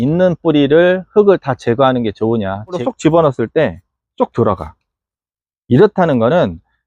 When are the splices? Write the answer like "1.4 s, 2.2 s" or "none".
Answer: 2.8 s

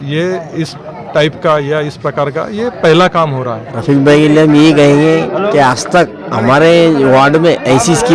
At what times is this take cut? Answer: 3.7 s

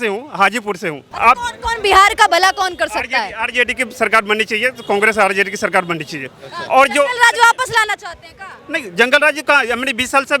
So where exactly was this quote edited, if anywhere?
1.0 s

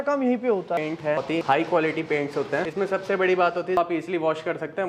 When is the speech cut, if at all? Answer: 1.2 s, 2.6 s, 3.8 s

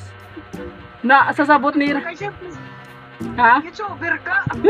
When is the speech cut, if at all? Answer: none

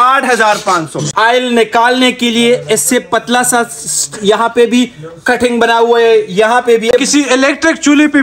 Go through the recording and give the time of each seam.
1.1 s, 6.9 s

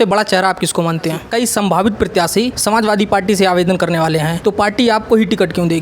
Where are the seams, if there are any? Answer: 1.2 s, 2.6 s, 4.3 s

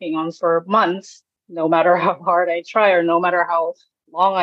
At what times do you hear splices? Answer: 1.4 s

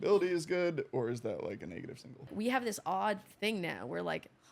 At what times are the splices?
2.3 s

